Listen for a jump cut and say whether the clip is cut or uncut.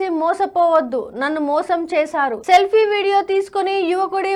uncut